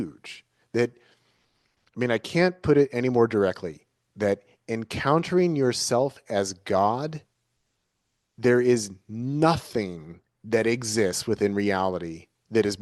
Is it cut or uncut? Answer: uncut